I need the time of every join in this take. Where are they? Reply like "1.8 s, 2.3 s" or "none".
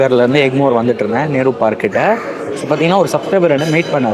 none